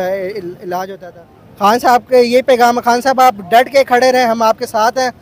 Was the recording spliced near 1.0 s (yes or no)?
yes